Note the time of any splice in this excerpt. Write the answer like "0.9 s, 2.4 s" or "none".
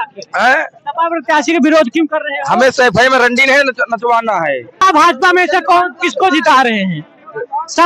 4.8 s